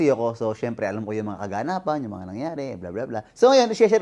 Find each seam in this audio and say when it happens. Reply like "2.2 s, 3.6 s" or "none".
none